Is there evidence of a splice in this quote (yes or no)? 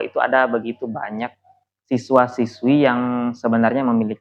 no